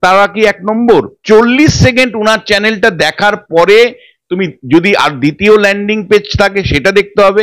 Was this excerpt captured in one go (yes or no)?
no